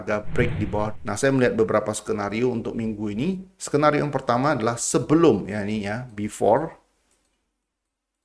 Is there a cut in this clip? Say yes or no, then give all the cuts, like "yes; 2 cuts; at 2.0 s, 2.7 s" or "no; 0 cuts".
yes; 1 cut; at 1.0 s